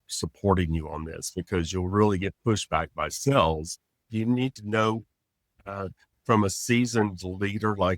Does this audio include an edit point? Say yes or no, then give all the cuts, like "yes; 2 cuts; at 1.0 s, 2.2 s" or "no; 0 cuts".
yes; 1 cut; at 4.1 s